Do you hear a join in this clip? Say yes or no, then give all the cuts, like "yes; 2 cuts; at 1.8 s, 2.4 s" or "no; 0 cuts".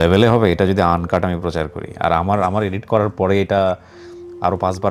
no; 0 cuts